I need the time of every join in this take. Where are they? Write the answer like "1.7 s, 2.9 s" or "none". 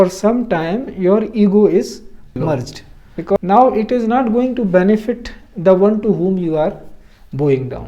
3.4 s